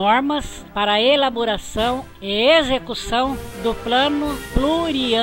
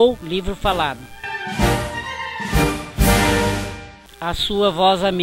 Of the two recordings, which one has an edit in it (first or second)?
second